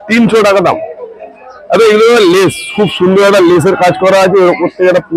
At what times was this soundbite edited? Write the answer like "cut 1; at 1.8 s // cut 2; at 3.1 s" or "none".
none